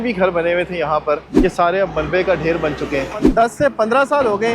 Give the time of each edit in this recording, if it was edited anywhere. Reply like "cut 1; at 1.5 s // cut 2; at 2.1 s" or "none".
cut 1; at 1.3 s // cut 2; at 3.2 s